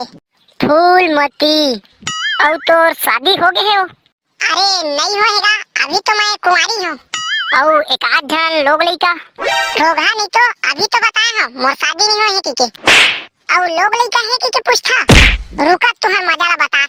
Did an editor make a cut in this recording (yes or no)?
no